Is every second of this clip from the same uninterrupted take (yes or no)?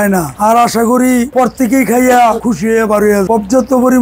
yes